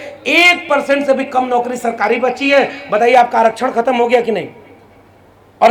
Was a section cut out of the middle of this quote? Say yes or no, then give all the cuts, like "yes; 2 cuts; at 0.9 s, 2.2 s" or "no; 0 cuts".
no; 0 cuts